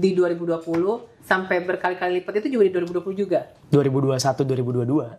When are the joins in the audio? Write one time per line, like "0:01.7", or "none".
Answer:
0:01.1
0:03.6